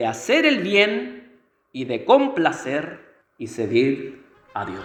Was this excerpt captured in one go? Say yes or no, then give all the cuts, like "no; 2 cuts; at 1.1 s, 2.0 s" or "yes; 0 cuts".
yes; 0 cuts